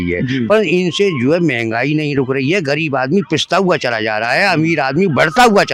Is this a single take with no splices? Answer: yes; 0 cuts

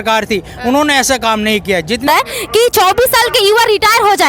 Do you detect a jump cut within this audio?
yes; 1 cut; at 2.0 s

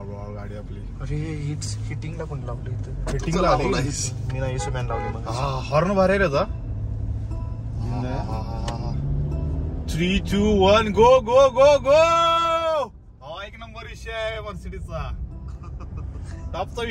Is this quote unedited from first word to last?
yes; 0 cuts

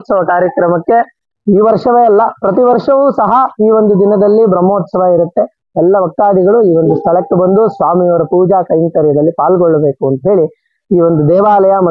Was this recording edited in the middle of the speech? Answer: no; 0 cuts

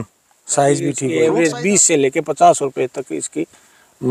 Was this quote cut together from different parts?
yes; 1 cut; at 1.0 s

